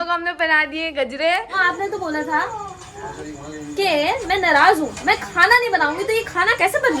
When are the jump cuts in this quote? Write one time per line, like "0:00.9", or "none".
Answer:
0:01.6

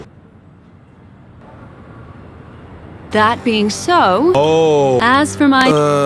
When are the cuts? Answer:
0:01.4
0:03.1

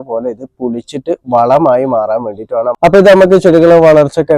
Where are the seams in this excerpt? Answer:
0:02.8

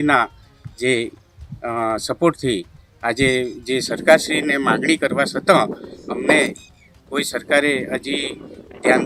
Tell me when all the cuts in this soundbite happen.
none

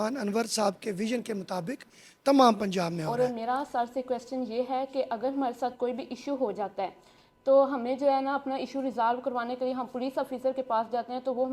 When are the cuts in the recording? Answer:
0:03.0

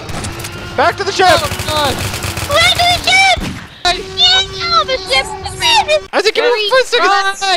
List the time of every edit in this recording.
0:03.8
0:06.1

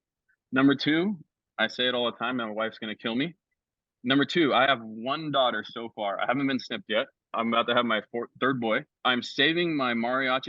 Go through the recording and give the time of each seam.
0:08.9

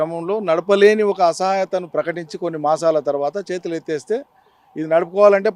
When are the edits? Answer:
none

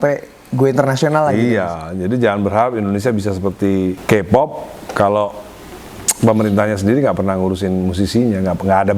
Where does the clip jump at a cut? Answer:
0:04.0

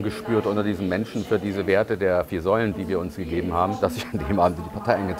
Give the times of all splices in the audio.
0:02.7
0:03.8

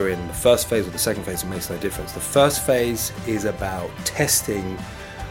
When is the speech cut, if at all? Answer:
none

